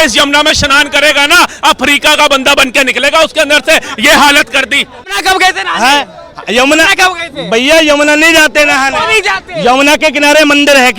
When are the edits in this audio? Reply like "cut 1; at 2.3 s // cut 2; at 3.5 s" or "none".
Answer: cut 1; at 5.1 s